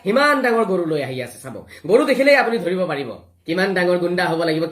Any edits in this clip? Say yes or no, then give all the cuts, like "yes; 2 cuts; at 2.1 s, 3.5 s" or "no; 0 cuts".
yes; 1 cut; at 3.4 s